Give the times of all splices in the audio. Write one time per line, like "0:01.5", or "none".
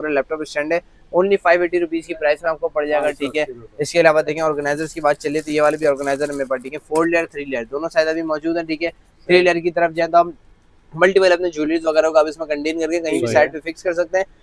none